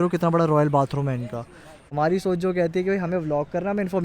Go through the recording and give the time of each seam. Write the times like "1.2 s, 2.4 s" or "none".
1.7 s